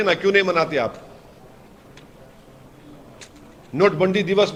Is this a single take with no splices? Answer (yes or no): yes